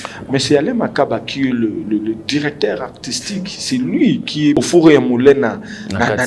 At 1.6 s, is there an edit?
no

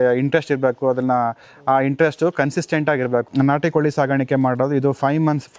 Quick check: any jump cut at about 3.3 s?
yes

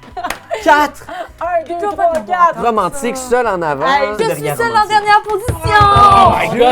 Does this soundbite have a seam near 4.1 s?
yes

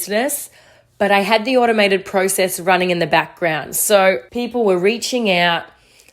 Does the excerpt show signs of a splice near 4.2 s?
yes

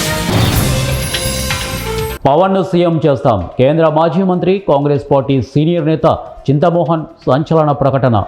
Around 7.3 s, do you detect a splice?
no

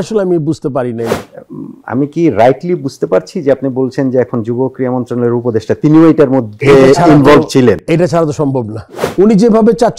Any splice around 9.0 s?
yes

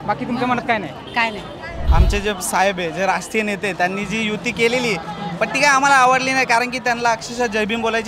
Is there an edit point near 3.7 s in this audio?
no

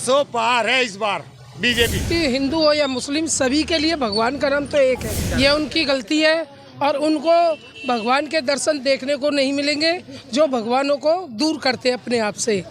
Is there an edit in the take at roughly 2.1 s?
yes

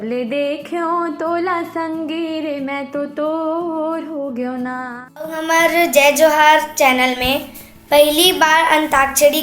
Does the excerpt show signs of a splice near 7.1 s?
no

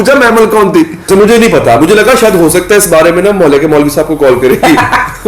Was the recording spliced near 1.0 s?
yes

